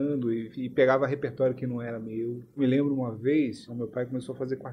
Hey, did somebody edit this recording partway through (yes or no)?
yes